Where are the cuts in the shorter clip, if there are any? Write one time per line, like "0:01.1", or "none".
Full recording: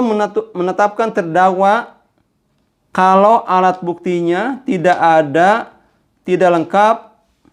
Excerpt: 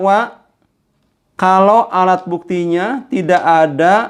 none